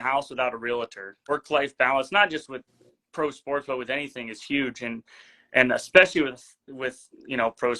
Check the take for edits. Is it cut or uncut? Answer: cut